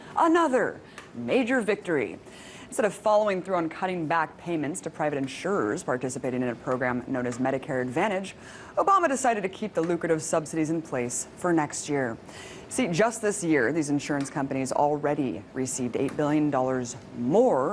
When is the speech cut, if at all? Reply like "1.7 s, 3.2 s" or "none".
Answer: 3.2 s